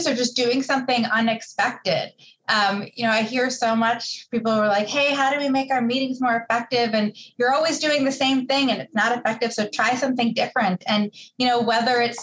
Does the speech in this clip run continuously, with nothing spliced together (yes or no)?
yes